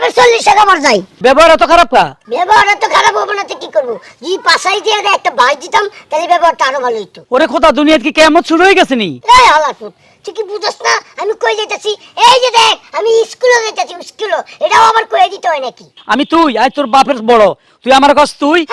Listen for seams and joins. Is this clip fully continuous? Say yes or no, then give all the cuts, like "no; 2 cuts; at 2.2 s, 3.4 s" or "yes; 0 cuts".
no; 5 cuts; at 1.1 s, 2.2 s, 7.1 s, 9.1 s, 16.0 s